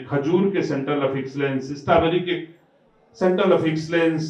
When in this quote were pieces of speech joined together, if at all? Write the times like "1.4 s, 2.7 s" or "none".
none